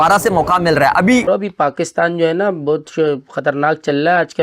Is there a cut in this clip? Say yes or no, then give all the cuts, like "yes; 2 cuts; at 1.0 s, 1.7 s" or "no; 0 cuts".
yes; 1 cut; at 1.2 s